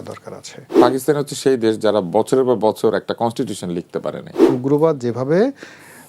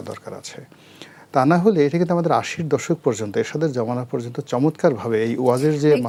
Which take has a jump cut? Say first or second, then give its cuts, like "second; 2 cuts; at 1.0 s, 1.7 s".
first; 2 cuts; at 0.8 s, 4.4 s